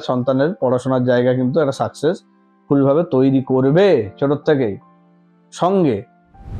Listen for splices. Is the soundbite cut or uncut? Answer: uncut